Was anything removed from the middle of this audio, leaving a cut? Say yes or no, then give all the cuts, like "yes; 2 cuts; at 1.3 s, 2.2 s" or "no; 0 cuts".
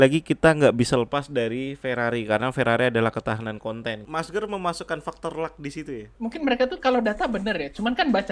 yes; 2 cuts; at 4.0 s, 6.1 s